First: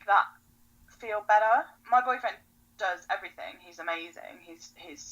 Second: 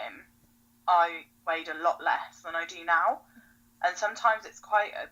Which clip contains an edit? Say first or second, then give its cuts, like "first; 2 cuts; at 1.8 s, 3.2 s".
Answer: first; 1 cut; at 1.8 s